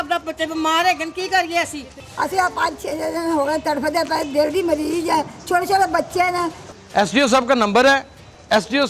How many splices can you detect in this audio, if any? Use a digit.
2